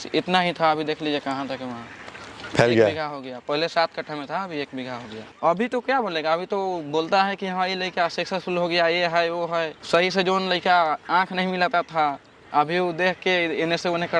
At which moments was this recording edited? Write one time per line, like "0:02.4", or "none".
0:05.3